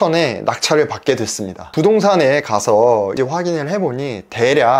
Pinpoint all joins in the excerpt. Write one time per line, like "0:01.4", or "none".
0:01.6
0:03.1